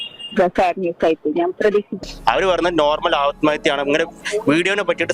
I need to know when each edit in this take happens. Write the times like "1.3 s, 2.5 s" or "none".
2.0 s